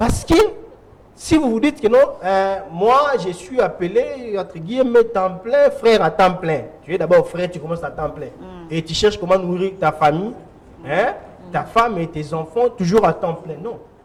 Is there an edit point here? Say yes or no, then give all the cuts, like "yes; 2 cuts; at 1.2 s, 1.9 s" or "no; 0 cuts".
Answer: no; 0 cuts